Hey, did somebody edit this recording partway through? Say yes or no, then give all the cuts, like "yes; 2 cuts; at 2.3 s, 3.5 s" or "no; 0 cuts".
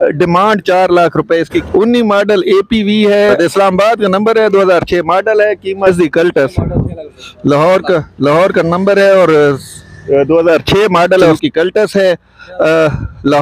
yes; 4 cuts; at 1.7 s, 3.4 s, 5.9 s, 11.4 s